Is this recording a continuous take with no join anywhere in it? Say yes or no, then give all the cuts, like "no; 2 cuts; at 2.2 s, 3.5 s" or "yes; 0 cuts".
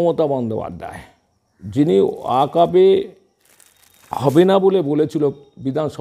yes; 0 cuts